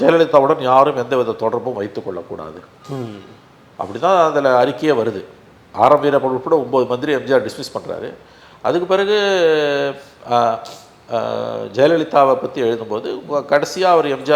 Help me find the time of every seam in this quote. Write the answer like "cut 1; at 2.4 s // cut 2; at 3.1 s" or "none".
none